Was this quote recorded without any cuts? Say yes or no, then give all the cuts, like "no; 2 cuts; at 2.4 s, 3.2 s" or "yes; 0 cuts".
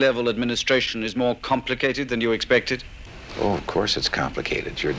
yes; 0 cuts